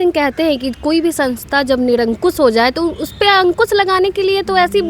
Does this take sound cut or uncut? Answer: uncut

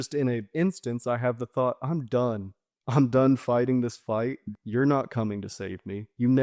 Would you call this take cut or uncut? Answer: cut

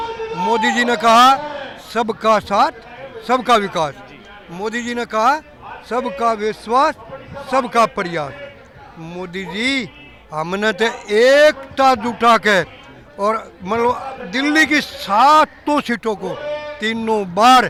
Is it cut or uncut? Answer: uncut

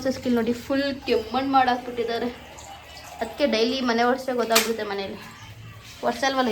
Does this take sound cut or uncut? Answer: uncut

